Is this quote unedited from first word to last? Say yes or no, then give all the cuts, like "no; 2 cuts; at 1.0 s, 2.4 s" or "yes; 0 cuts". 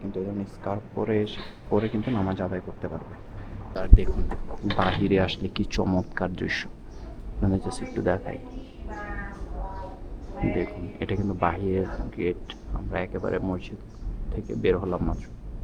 no; 1 cut; at 3.8 s